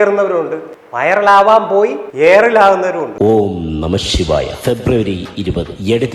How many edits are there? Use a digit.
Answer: 1